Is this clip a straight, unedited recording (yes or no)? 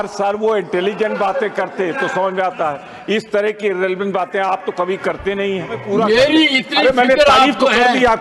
no